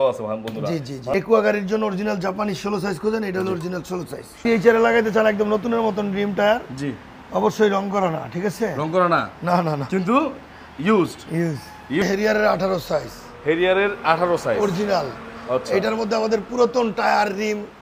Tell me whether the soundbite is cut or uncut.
cut